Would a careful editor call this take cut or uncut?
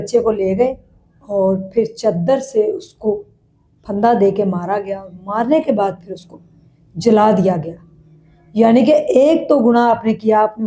uncut